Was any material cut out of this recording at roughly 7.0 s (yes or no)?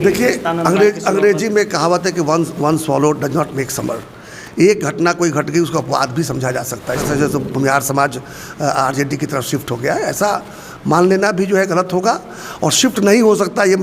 yes